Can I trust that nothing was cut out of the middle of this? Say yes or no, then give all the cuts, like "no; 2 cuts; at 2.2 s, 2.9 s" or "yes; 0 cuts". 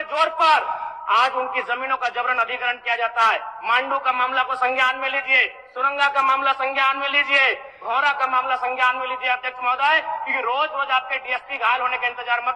yes; 0 cuts